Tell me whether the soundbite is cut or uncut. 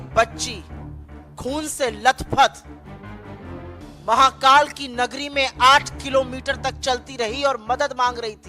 cut